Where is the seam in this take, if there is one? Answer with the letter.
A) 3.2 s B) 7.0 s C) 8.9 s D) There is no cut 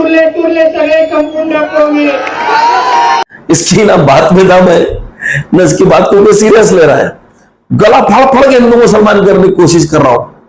A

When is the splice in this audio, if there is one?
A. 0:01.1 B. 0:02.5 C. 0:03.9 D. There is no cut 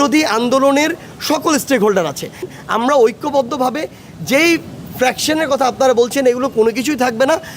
B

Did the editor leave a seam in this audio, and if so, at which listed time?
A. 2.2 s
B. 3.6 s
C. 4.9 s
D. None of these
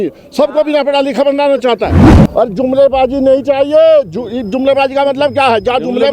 A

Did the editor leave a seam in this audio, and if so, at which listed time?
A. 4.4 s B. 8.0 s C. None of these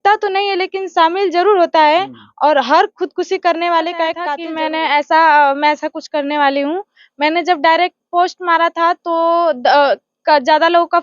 A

